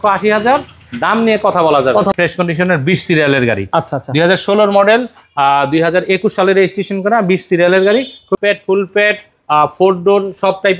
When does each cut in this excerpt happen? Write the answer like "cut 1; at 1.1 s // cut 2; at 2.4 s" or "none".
cut 1; at 2.1 s // cut 2; at 8.4 s